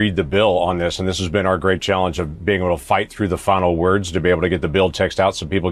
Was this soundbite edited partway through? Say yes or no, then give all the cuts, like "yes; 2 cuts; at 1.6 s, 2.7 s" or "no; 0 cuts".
no; 0 cuts